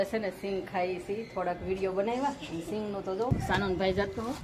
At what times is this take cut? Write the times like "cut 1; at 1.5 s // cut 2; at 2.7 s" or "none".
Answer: cut 1; at 3.3 s